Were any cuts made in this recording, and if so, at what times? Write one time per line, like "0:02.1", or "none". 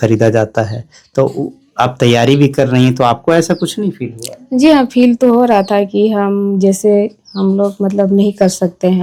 none